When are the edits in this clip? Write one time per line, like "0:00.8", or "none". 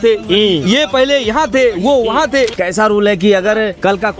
0:02.6